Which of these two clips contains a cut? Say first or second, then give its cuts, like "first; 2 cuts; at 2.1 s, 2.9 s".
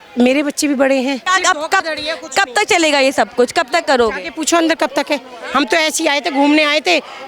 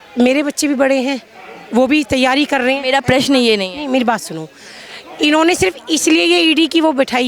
first; 1 cut; at 1.2 s